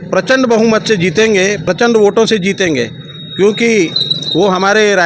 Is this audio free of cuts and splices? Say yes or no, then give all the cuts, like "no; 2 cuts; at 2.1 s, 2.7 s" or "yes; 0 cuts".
no; 1 cut; at 1.6 s